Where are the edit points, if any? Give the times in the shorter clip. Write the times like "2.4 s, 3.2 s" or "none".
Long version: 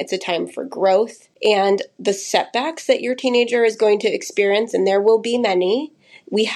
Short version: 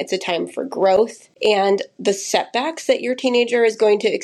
none